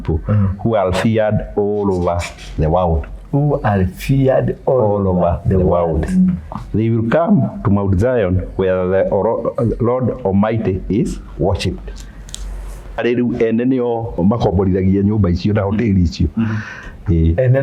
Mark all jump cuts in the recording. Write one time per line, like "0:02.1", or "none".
0:13.0
0:14.2